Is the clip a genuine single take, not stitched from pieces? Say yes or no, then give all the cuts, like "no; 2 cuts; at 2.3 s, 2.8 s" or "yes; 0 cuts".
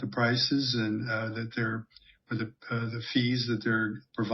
yes; 0 cuts